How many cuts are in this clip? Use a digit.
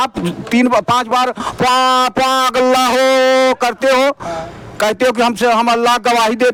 0